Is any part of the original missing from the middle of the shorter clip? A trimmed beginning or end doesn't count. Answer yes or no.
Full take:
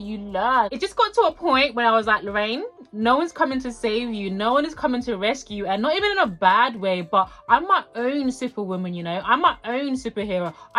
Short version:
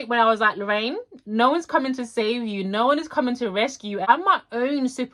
yes